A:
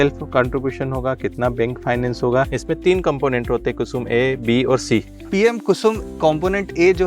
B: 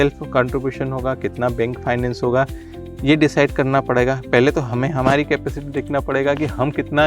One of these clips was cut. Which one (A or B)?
A